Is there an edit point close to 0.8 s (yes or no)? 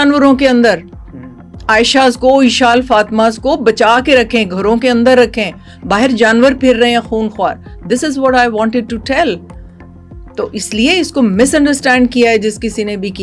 no